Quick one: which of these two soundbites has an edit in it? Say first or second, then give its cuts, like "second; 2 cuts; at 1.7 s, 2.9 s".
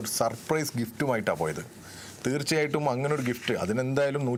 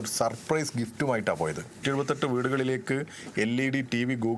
second; 1 cut; at 1.8 s